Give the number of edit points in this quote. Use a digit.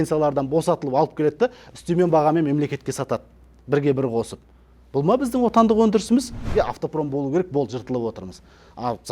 1